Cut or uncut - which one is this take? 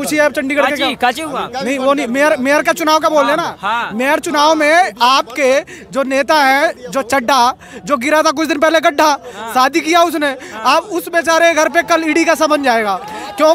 uncut